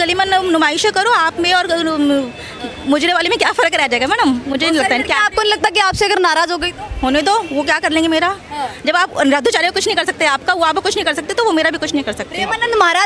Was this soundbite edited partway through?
no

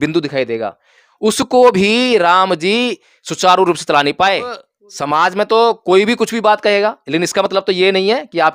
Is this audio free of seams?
no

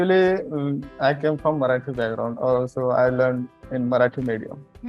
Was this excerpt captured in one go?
no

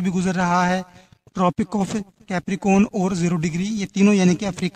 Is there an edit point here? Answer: no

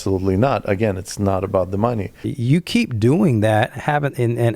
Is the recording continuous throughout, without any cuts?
no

